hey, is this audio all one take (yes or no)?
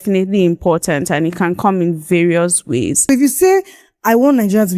no